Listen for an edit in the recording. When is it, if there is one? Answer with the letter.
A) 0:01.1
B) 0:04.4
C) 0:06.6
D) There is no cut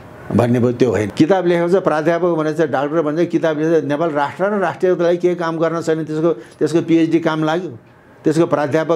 A